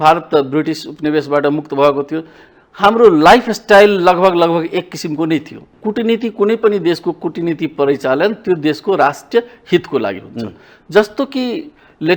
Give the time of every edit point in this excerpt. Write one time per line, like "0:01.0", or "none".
0:05.7